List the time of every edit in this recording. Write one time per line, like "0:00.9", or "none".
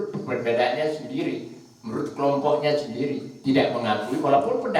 none